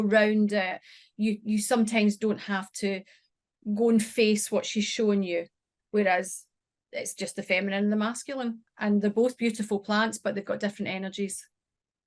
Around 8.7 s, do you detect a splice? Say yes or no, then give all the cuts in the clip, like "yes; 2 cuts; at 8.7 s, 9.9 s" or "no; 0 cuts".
yes; 1 cut; at 8.7 s